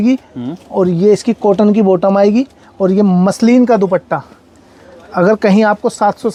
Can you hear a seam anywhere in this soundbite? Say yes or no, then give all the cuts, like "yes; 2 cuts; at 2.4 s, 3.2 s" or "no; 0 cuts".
no; 0 cuts